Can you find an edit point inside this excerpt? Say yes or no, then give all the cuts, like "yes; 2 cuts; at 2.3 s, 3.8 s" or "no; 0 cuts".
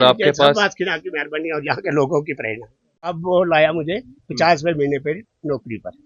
yes; 1 cut; at 3.1 s